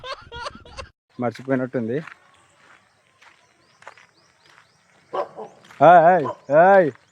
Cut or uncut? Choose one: cut